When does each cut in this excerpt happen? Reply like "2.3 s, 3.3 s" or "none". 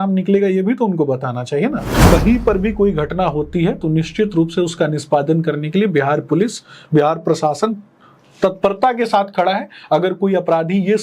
1.9 s